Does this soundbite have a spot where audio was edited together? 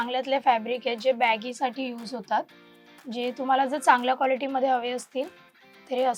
no; 0 cuts

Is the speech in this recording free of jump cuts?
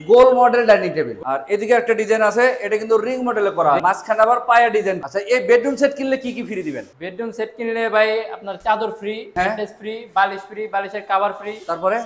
no; 4 cuts; at 1.2 s, 3.8 s, 5.0 s, 9.2 s

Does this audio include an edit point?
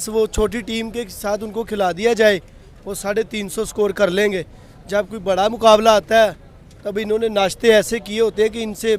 no; 0 cuts

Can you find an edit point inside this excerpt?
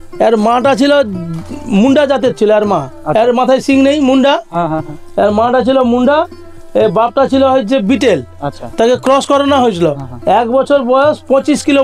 no; 0 cuts

